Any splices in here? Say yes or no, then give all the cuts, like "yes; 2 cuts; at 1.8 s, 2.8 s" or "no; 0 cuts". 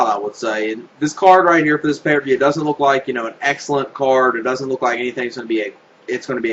yes; 1 cut; at 2.0 s